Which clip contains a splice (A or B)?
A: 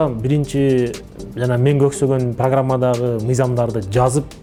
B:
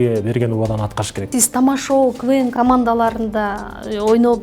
B